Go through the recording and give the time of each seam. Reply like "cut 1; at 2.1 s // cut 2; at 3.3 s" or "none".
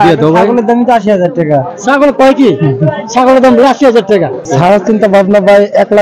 cut 1; at 4.5 s